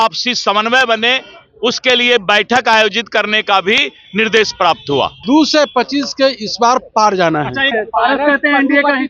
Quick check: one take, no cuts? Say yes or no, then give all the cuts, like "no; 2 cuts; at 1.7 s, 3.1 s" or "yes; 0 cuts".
no; 2 cuts; at 5.1 s, 7.7 s